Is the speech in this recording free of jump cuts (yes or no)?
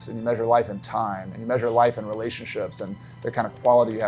yes